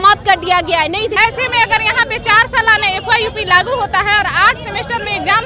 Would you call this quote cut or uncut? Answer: cut